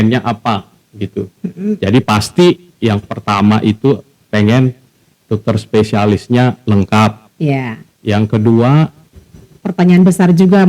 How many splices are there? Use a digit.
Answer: 1